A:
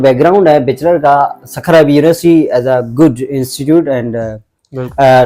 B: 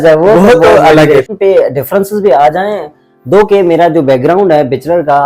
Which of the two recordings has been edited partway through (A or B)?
B